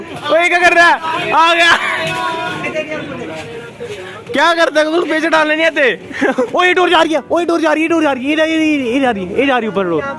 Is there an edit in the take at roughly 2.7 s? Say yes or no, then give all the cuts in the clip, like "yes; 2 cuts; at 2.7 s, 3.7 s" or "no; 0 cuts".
yes; 2 cuts; at 2.7 s, 6.5 s